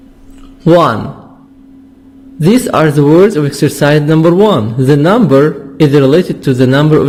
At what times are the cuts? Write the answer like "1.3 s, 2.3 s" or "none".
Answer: none